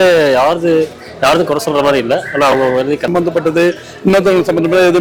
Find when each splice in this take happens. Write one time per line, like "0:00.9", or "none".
0:03.1